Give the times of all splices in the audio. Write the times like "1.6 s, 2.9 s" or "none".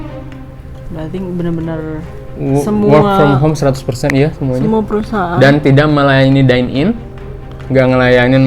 none